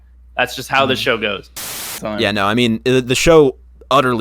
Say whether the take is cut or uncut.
cut